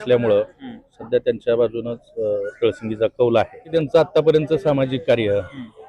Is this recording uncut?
no; 1 cut; at 3.7 s

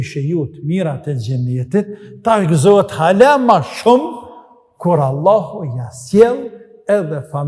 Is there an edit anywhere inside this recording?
no; 0 cuts

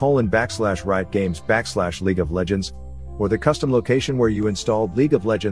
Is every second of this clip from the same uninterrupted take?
yes; 0 cuts

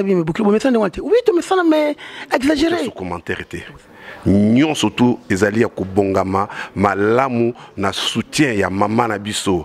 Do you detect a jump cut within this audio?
yes; 1 cut; at 3.1 s

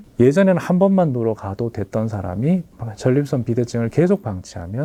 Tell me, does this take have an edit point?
no; 0 cuts

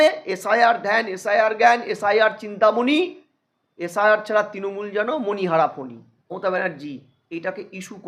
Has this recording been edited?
yes; 1 cut; at 6.2 s

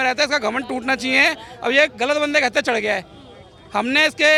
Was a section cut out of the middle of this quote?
no; 0 cuts

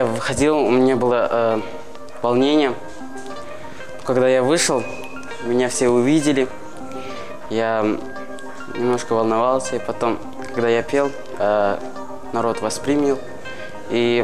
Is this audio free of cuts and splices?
yes; 0 cuts

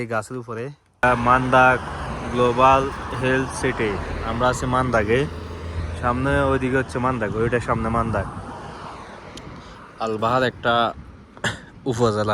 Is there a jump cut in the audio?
yes; 1 cut; at 1.0 s

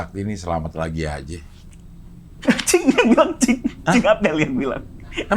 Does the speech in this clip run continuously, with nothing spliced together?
yes; 0 cuts

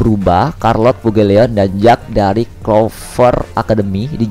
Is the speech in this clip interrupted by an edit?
no; 0 cuts

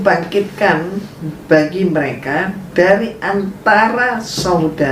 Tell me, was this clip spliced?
no; 0 cuts

